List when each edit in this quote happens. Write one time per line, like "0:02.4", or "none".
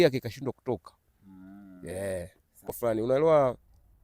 0:02.7